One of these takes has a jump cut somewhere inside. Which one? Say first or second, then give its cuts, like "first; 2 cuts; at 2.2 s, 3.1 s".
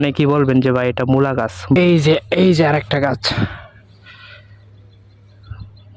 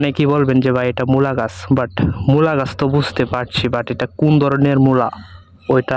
first; 1 cut; at 1.8 s